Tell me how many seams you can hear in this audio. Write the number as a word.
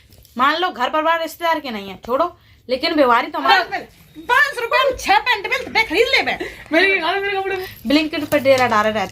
two